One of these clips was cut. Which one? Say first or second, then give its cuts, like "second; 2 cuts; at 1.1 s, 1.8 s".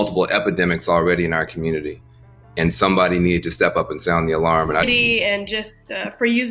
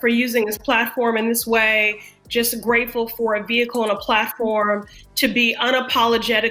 first; 1 cut; at 4.8 s